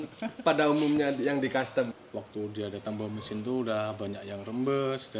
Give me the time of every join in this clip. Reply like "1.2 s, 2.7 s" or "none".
2.0 s